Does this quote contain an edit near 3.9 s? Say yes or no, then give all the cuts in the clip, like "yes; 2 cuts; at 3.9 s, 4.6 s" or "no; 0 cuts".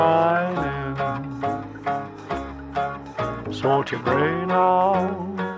yes; 1 cut; at 3.9 s